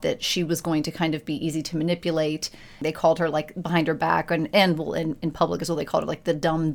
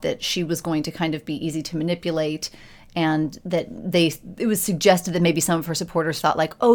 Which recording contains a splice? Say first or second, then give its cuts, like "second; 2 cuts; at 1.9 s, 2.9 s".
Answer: first; 1 cut; at 2.8 s